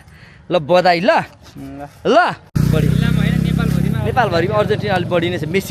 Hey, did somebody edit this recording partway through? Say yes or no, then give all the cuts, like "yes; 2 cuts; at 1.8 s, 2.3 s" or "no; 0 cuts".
no; 0 cuts